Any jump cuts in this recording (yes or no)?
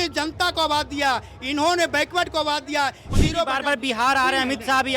yes